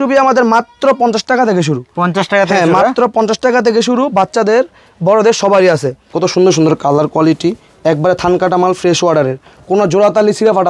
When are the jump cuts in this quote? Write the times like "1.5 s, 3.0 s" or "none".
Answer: 6.1 s